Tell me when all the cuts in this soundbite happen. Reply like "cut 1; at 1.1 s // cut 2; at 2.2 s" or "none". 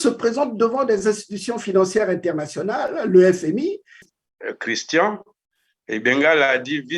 cut 1; at 4.1 s